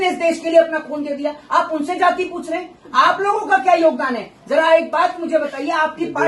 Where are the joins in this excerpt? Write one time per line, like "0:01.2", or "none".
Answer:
none